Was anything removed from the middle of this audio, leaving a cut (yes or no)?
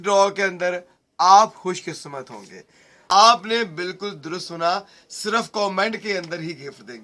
yes